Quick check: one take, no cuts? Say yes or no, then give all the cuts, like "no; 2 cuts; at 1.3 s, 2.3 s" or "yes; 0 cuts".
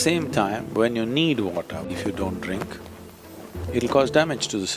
no; 1 cut; at 1.9 s